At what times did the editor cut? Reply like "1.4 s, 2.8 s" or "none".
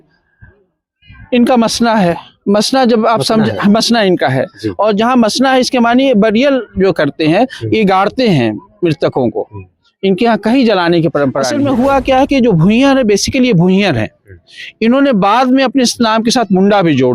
11.5 s